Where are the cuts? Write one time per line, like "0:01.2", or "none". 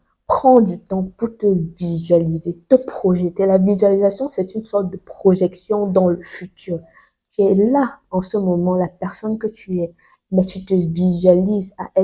none